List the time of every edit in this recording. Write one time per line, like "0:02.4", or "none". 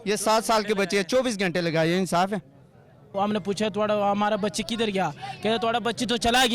0:03.1